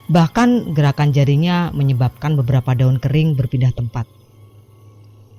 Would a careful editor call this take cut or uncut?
uncut